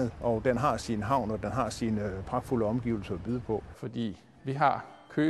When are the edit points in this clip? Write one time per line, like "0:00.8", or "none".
0:04.2